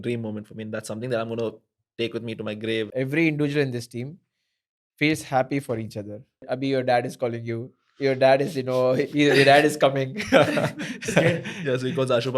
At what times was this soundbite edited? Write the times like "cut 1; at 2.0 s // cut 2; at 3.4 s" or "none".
cut 1; at 2.9 s // cut 2; at 6.4 s